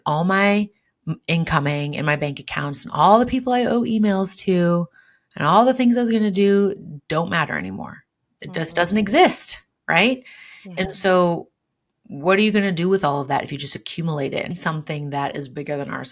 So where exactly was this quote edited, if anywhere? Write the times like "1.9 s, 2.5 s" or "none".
14.5 s